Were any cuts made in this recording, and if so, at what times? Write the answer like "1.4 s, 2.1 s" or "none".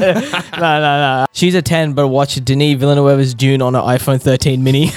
1.3 s